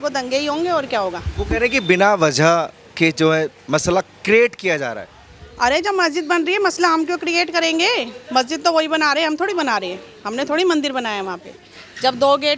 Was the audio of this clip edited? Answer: no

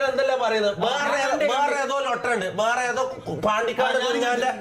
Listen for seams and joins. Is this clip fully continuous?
yes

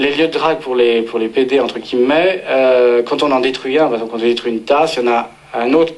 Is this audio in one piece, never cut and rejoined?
no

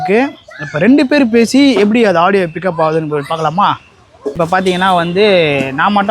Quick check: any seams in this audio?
yes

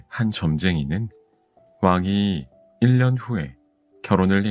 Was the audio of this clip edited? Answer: no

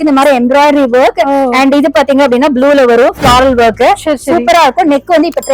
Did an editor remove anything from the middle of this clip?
no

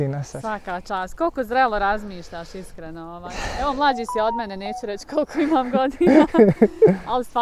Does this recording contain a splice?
no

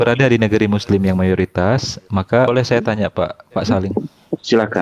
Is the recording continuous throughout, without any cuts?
no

